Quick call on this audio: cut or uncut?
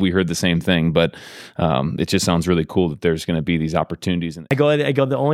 cut